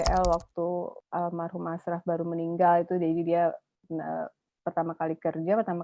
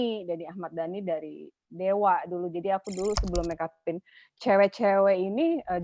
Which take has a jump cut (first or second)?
first